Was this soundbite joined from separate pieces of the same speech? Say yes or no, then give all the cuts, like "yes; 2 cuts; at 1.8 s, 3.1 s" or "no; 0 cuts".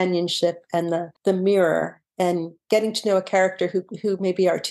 yes; 2 cuts; at 1.1 s, 2.5 s